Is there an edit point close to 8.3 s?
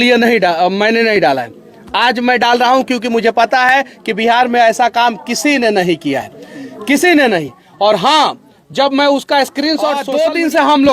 no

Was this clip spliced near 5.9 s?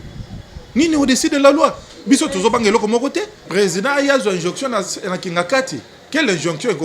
no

